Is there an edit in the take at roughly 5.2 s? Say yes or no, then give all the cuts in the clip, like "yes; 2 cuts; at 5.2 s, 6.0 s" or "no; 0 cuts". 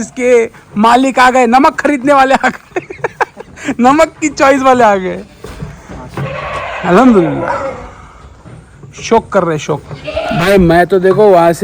no; 0 cuts